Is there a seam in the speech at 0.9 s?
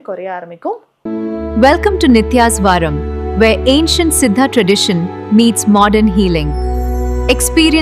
yes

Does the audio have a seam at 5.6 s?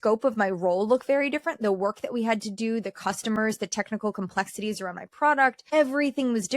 yes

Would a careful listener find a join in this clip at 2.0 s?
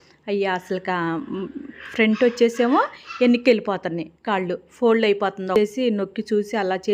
no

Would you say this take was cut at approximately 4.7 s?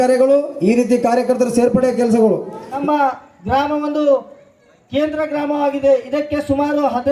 no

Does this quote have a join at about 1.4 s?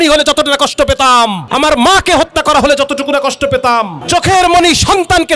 yes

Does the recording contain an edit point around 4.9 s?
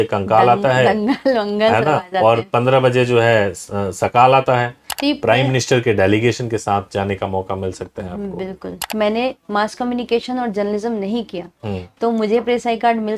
yes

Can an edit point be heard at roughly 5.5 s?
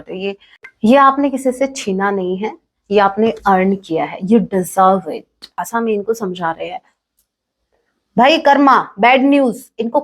yes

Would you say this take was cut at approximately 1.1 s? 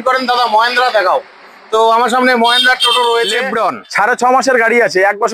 no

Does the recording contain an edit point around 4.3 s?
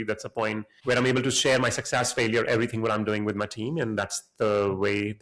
no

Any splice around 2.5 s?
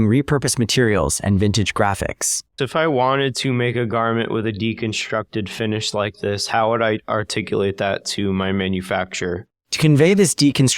yes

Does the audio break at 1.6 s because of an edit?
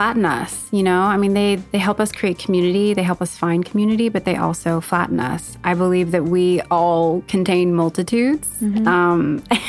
yes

